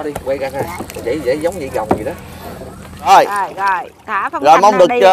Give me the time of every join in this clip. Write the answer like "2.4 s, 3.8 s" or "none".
3.1 s